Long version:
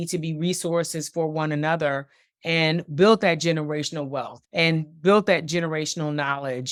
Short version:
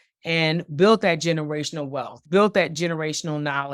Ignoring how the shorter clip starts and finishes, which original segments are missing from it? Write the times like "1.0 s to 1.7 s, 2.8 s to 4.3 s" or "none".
4.4 s to 4.9 s

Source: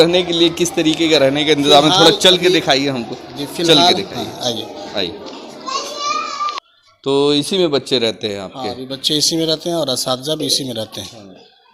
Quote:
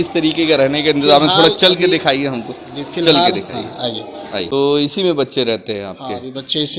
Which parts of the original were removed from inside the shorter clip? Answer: 5.1 s to 7.0 s

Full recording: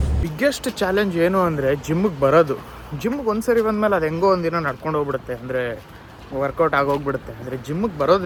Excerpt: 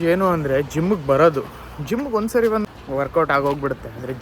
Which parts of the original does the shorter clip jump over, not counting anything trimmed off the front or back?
3.8 s to 6.1 s

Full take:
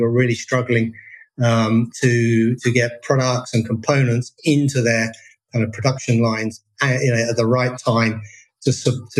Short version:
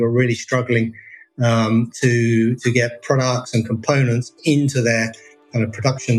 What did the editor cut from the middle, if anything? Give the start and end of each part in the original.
none

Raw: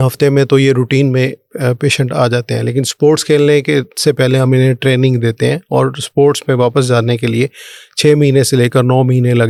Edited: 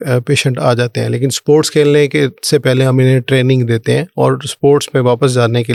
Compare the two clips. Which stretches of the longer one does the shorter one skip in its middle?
none

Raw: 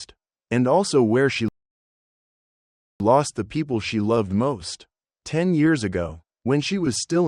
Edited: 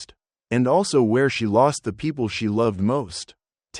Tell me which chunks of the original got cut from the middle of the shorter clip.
1.5 s to 3.0 s

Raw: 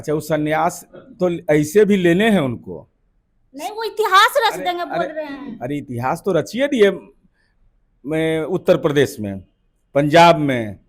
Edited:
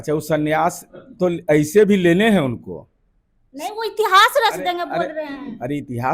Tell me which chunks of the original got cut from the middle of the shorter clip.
none

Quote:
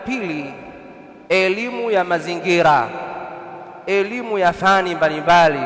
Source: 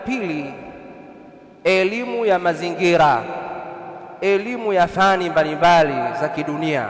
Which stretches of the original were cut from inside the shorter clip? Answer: 1.3 s to 1.7 s

